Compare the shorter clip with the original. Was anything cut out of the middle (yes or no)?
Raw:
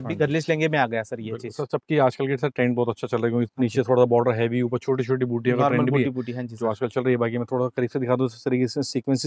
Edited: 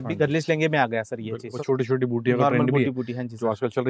yes